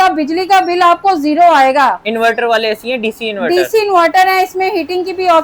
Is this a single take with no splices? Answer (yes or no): yes